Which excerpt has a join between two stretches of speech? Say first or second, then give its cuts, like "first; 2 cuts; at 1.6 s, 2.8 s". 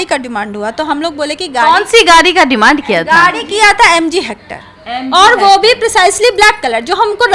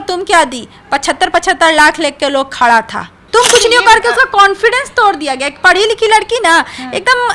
second; 1 cut; at 3.1 s